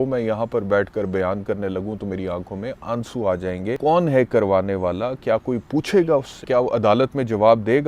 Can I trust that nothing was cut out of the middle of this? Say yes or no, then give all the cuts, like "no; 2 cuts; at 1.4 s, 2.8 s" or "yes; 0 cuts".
no; 2 cuts; at 3.8 s, 6.4 s